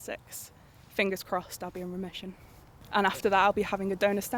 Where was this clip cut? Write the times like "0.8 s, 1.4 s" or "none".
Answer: 2.8 s